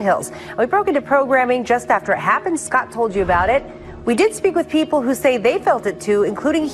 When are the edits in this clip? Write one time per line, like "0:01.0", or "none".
0:03.7

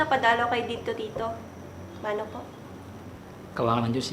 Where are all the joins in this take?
none

